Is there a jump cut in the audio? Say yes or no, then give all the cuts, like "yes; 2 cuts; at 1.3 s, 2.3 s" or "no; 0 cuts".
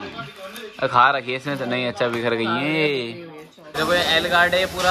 yes; 1 cut; at 3.7 s